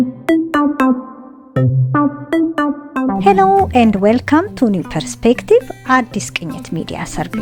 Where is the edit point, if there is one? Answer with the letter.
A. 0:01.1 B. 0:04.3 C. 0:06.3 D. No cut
D